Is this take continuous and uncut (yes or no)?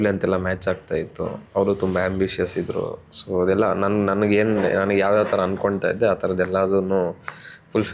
yes